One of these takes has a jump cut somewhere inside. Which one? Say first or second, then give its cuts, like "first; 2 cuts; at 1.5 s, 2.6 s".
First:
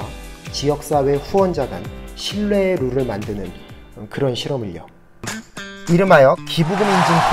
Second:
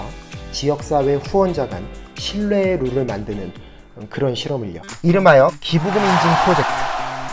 second; 1 cut; at 4.9 s